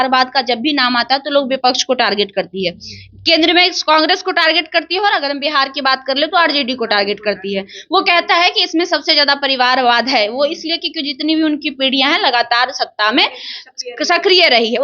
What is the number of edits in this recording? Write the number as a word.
zero